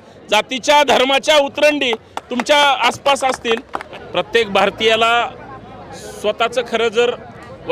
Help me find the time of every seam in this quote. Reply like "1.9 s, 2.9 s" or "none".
3.8 s